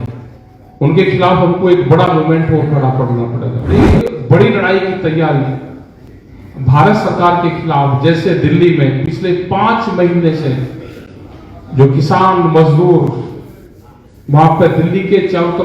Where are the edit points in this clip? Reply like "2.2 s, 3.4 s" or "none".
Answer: 3.8 s